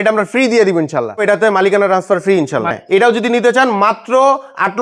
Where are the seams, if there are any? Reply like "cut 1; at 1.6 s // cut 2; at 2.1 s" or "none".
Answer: cut 1; at 1.2 s // cut 2; at 2.8 s